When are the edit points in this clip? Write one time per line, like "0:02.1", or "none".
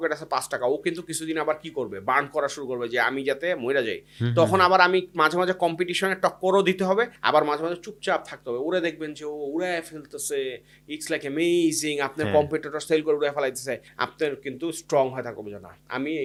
none